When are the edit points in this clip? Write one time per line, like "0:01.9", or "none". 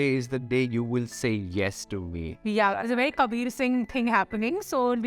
0:02.4